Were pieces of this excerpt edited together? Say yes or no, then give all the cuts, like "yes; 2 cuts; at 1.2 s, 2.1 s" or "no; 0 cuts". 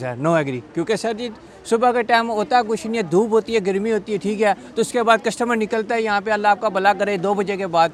no; 0 cuts